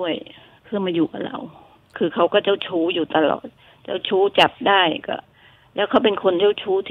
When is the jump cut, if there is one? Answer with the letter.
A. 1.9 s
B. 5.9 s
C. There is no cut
A